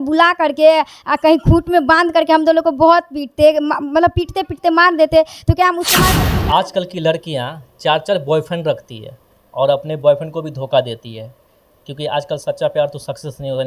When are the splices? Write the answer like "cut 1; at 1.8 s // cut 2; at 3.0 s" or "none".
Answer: cut 1; at 6.2 s